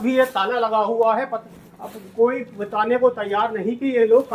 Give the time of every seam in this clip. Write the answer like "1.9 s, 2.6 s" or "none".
none